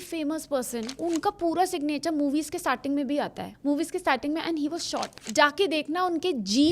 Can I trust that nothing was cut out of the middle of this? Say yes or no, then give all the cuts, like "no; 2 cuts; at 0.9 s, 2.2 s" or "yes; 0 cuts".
no; 3 cuts; at 0.9 s, 3.5 s, 5.2 s